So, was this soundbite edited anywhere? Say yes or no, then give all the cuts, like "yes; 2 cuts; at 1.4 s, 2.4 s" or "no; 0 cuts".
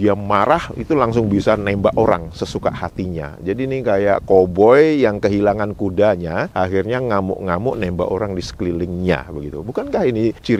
no; 0 cuts